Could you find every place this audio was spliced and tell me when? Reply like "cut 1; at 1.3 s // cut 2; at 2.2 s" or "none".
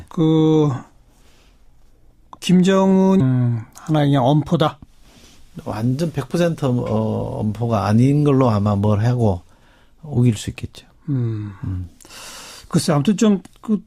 none